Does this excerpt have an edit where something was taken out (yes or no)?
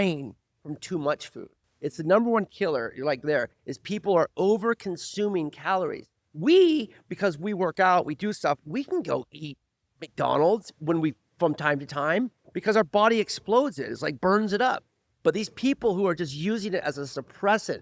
no